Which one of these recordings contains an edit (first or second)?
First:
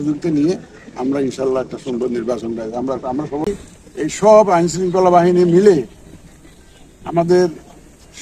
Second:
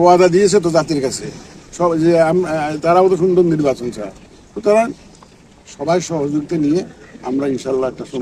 first